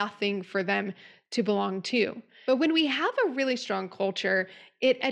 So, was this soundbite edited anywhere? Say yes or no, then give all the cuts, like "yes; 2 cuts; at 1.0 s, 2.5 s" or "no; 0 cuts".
yes; 1 cut; at 2.3 s